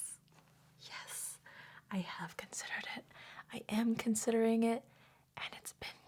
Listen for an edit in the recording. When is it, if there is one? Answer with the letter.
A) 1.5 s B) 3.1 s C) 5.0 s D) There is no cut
D